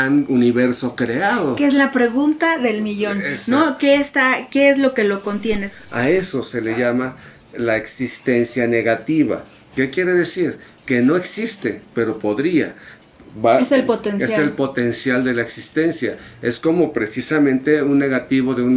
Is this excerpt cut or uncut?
cut